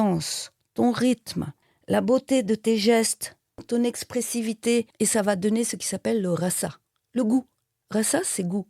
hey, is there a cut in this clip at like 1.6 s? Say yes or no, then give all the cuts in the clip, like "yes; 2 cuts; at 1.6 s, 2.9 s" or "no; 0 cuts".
no; 1 cut; at 3.6 s